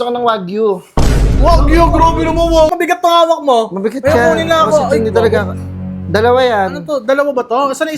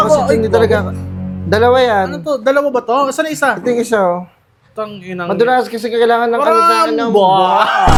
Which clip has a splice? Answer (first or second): first